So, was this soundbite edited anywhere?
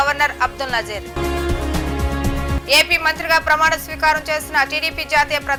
no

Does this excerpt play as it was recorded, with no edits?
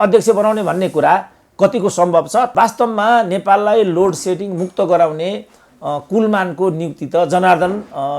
no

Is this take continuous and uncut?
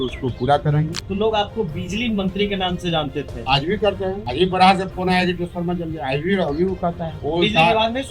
no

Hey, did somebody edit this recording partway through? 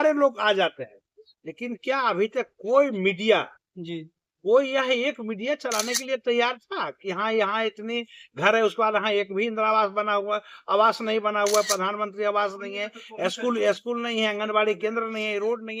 no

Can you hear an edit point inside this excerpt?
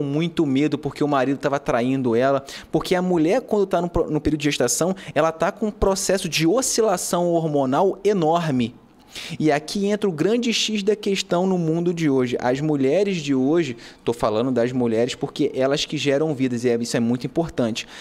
no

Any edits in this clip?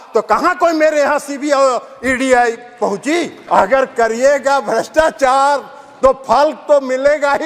yes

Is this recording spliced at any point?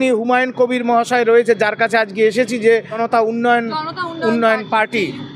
yes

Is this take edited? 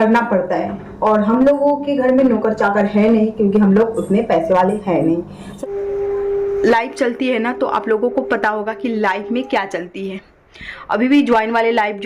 yes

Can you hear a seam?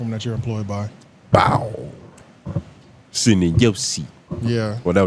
no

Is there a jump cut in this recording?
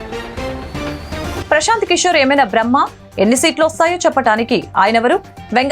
yes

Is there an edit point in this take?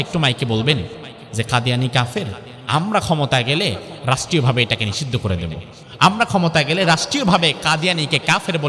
no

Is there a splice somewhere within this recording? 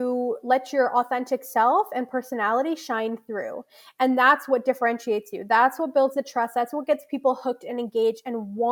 no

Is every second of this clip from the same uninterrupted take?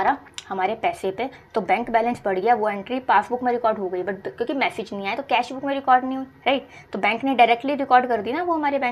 yes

